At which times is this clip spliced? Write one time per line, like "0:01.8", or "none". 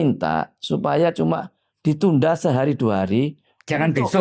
none